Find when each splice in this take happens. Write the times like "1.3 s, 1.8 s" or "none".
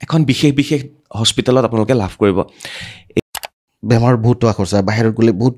3.3 s